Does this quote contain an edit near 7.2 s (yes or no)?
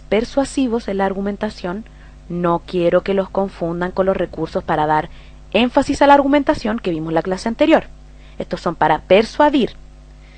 no